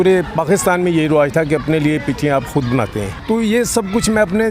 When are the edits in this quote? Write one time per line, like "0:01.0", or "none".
0:03.1

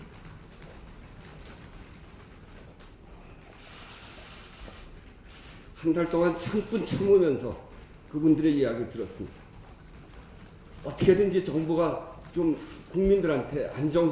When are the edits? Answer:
0:10.9

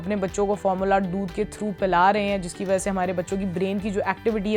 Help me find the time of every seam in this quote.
none

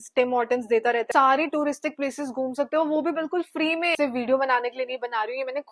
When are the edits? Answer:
0:01.1
0:03.9

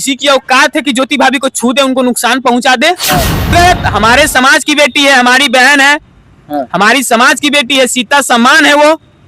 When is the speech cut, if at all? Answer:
0:03.5

